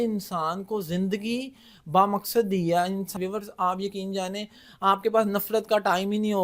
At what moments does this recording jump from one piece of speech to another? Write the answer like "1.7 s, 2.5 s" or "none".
3.1 s